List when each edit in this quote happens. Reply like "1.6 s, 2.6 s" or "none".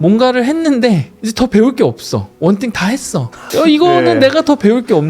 1.2 s, 2.3 s, 3.4 s